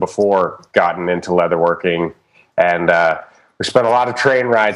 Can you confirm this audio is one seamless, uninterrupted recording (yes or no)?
yes